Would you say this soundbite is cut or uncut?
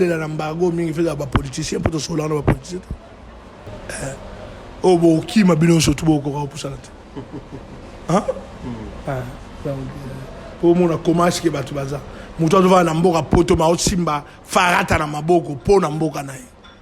cut